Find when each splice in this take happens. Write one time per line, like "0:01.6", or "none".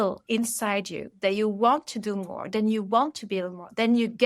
none